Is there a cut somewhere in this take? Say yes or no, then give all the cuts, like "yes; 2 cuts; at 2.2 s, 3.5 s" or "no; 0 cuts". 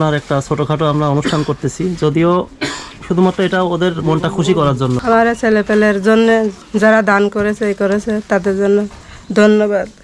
yes; 1 cut; at 5.0 s